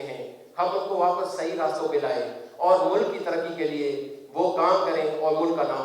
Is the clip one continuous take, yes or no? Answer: yes